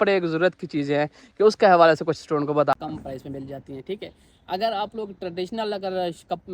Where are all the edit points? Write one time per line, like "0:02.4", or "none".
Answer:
0:02.7